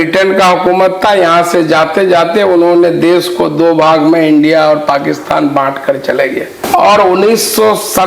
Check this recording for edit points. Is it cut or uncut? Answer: cut